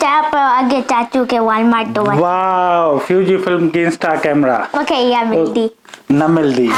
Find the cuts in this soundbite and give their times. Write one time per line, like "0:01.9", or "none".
none

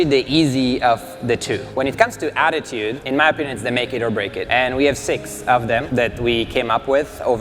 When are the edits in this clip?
0:01.7
0:03.0
0:04.4
0:05.9

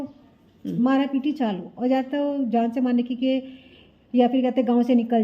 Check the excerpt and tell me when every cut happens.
none

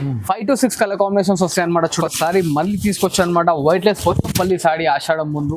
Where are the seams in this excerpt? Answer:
0:02.0

